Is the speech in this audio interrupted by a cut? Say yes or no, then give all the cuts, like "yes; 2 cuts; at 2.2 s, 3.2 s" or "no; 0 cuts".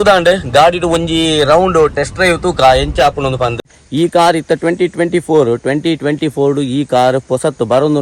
yes; 1 cut; at 3.8 s